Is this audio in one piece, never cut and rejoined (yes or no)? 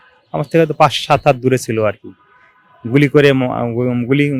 yes